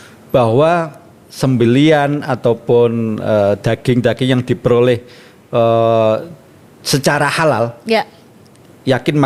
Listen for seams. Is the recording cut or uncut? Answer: uncut